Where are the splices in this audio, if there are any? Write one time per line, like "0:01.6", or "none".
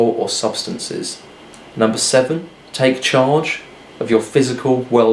none